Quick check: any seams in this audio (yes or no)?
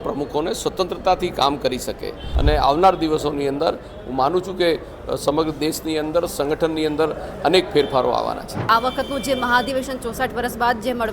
yes